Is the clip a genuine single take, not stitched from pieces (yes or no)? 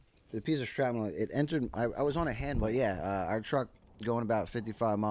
no